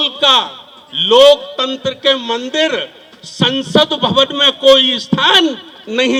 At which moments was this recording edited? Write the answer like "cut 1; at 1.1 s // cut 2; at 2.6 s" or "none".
none